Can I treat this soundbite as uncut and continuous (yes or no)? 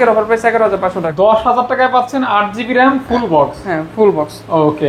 no